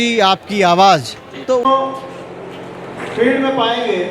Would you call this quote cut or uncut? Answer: cut